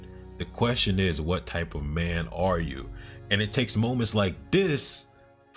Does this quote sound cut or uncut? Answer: uncut